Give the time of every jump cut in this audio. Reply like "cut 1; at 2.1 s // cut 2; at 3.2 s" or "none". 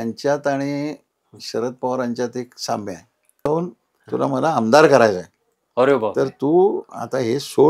cut 1; at 3.5 s

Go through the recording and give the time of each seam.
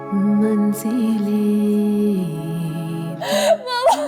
cut 1; at 3.1 s

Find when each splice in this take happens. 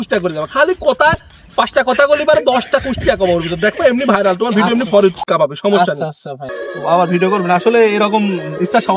cut 1; at 6.4 s

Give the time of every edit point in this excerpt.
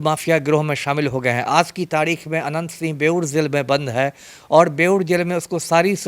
none

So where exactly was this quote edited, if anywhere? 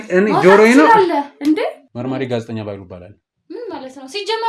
cut 1; at 1.9 s

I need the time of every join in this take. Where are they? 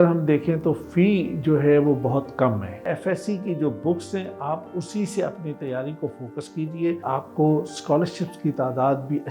cut 1; at 2.9 s // cut 2; at 7.0 s

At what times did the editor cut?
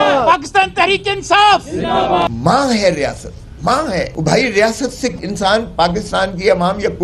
cut 1; at 2.3 s // cut 2; at 4.1 s // cut 3; at 5.2 s

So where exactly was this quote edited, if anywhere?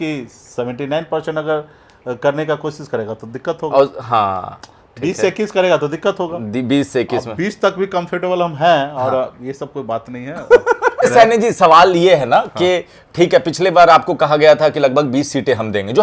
cut 1; at 11.0 s

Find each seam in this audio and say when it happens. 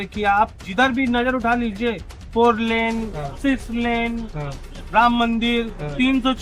none

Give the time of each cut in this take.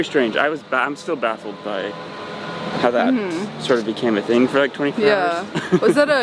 none

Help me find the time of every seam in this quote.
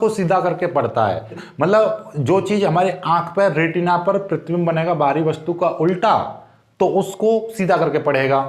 cut 1; at 1.4 s

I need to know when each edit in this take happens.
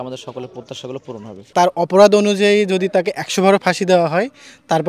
cut 1; at 1.5 s

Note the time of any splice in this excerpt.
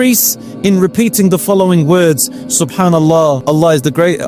none

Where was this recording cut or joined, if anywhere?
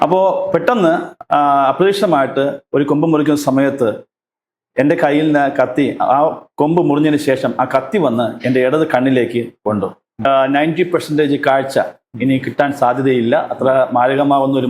cut 1; at 10.2 s

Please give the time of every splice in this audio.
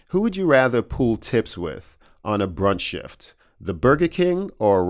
none

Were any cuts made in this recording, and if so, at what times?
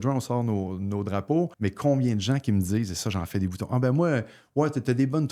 cut 1; at 1.5 s

